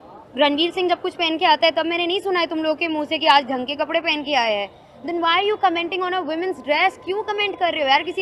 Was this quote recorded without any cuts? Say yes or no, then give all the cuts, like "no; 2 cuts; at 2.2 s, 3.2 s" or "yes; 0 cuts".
yes; 0 cuts